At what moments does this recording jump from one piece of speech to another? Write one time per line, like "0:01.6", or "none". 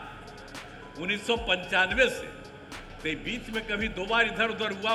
none